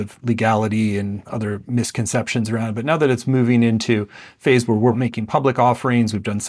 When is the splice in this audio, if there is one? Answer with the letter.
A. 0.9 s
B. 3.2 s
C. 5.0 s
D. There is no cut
C